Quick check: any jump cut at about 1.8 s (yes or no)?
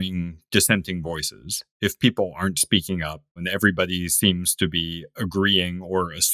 no